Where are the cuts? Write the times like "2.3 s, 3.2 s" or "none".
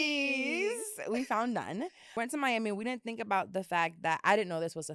2.0 s